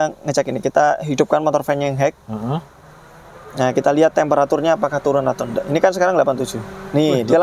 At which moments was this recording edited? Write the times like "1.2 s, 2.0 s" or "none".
none